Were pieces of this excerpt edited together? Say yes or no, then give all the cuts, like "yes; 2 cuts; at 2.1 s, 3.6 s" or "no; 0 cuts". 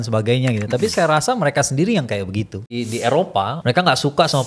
yes; 2 cuts; at 2.7 s, 3.6 s